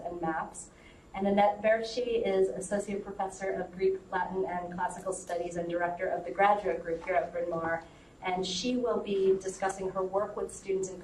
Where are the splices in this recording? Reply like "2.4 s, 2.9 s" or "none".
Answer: 4.3 s